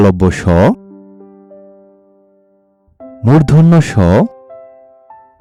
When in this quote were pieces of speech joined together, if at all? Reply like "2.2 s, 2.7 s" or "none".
none